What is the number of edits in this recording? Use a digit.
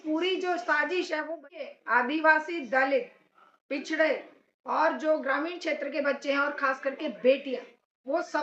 1